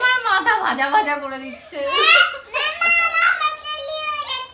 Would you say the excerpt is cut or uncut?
uncut